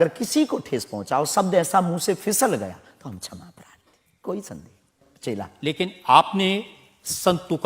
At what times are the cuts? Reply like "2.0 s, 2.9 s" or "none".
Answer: 5.0 s